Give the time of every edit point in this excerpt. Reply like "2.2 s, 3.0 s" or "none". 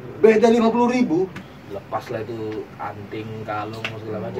1.3 s